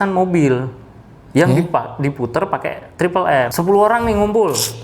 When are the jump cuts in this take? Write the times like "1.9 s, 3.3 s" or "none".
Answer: 3.5 s